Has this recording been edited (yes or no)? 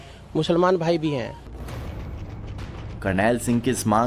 yes